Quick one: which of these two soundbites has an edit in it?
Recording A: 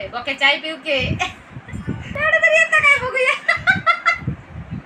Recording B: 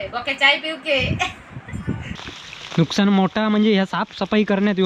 B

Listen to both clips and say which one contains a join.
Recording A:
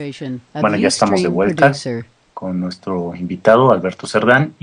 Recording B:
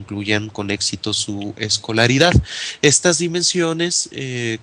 B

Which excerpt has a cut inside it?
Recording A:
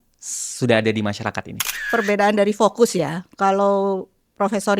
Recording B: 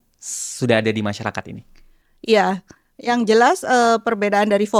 A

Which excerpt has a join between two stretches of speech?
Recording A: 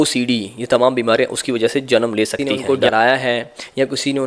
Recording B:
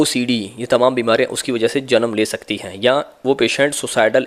A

